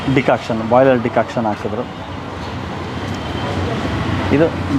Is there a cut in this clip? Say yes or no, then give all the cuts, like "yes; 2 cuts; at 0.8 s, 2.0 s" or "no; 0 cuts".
no; 0 cuts